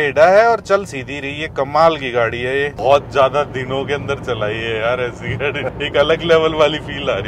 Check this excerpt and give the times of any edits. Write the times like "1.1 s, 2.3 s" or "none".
2.7 s, 5.7 s